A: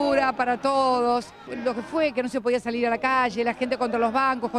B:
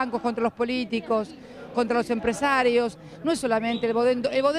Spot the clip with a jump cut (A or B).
A